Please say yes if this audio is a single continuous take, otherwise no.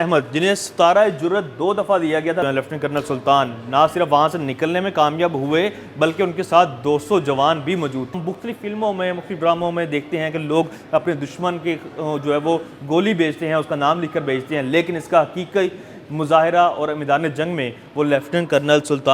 no